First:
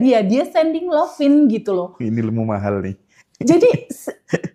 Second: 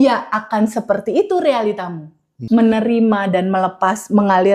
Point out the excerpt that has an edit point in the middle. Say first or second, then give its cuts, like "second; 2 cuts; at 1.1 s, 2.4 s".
second; 1 cut; at 2.3 s